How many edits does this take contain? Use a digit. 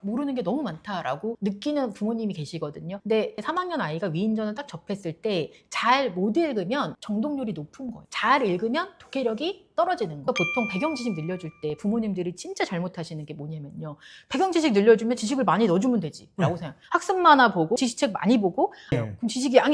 2